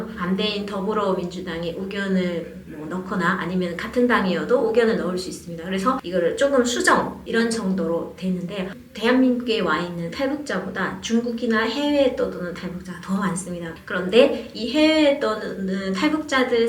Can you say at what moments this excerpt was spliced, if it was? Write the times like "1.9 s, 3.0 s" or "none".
8.8 s, 13.7 s